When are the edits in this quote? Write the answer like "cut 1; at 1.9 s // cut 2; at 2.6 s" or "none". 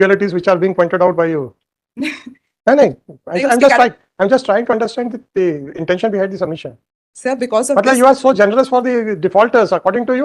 none